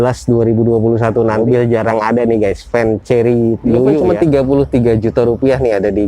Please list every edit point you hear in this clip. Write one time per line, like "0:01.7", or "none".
0:01.4
0:04.0